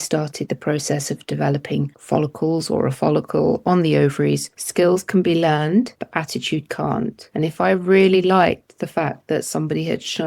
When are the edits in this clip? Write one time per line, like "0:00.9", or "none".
0:02.0
0:04.6
0:06.0
0:07.2